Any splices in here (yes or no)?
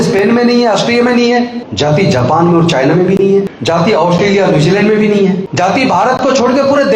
yes